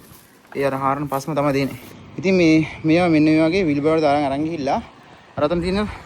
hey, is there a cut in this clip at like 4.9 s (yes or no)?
no